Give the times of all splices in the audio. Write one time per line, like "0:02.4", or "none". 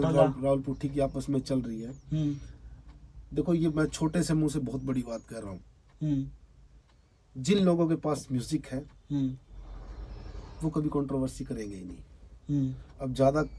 none